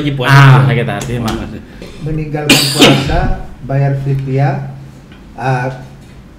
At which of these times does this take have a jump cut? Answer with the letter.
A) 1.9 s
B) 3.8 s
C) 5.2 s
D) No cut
A